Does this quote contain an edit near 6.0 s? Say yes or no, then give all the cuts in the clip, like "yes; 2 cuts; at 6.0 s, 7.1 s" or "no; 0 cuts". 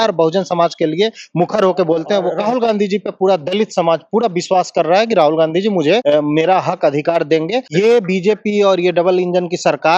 yes; 3 cuts; at 2.4 s, 6.0 s, 7.6 s